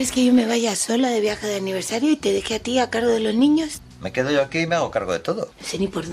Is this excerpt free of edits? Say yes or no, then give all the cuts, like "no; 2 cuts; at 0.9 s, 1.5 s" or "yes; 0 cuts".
yes; 0 cuts